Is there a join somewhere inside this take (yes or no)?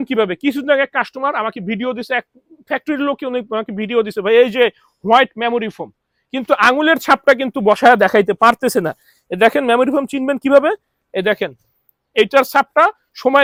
no